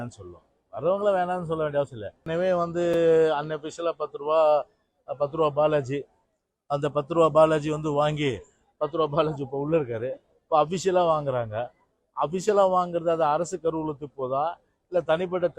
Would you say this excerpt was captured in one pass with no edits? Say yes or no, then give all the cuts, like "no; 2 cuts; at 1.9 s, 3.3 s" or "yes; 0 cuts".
no; 1 cut; at 2.2 s